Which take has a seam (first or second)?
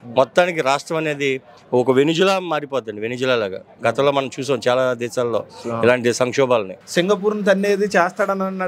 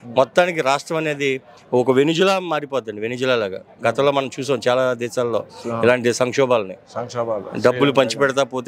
first